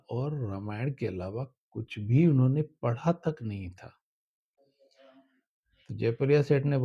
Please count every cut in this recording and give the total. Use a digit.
1